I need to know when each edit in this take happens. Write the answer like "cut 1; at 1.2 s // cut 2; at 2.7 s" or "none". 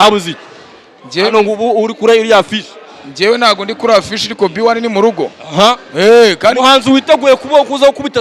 none